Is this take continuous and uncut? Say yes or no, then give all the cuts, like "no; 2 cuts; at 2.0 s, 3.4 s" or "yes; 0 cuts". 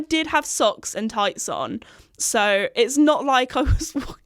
yes; 0 cuts